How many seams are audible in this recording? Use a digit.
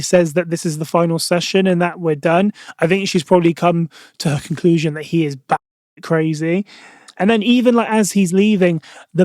0